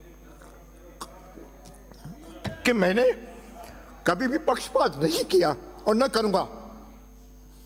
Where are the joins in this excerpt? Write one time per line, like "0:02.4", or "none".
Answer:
none